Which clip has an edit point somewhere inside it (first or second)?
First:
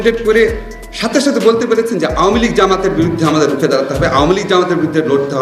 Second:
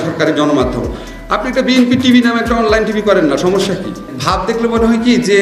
second